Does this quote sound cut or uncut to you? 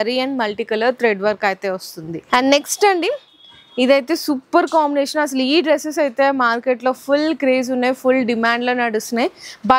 uncut